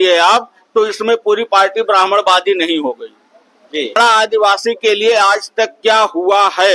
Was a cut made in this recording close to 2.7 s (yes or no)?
no